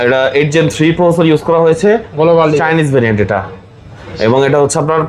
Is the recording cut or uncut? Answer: uncut